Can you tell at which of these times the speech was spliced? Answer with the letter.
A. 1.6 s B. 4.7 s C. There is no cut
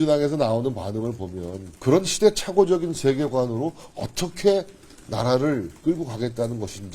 A